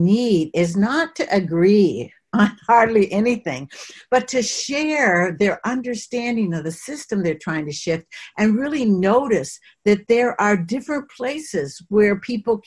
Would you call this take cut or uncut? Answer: uncut